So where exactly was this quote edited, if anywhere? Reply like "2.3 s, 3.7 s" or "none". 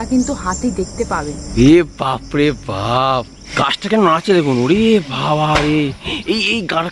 1.4 s, 3.4 s